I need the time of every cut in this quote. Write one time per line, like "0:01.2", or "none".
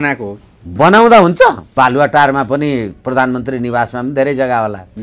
0:01.6